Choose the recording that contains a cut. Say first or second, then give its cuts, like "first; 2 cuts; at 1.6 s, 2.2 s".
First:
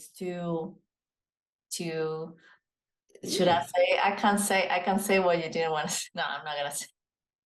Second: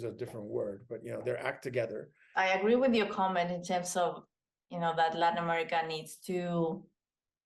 second; 1 cut; at 2.4 s